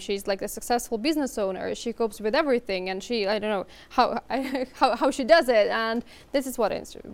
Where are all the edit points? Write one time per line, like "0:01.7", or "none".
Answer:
none